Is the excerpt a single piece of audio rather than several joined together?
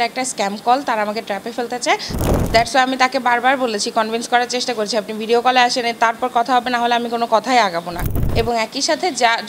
no; 2 cuts; at 2.2 s, 8.2 s

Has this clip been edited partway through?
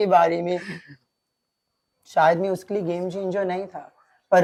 no; 0 cuts

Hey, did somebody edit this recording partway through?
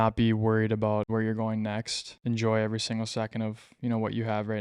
yes; 2 cuts; at 1.1 s, 2.0 s

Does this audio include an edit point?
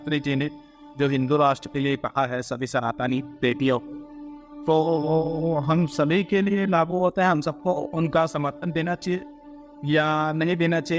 no; 0 cuts

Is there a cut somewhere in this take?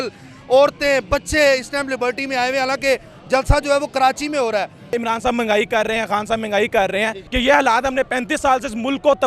yes; 2 cuts; at 5.0 s, 7.3 s

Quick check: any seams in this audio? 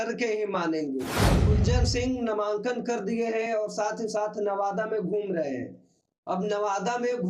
yes; 1 cut; at 1.5 s

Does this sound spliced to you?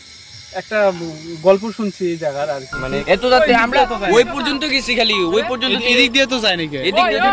yes; 1 cut; at 3.0 s

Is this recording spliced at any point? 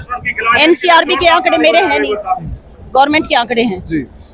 no; 0 cuts

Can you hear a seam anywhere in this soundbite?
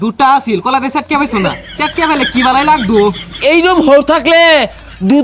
no; 0 cuts

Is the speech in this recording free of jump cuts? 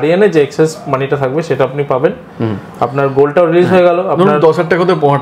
yes; 0 cuts

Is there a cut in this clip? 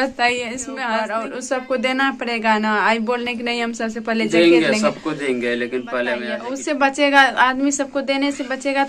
yes; 2 cuts; at 0.9 s, 6.3 s

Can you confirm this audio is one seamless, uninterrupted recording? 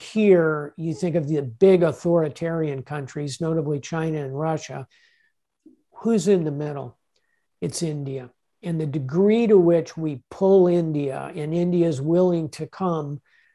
yes; 0 cuts

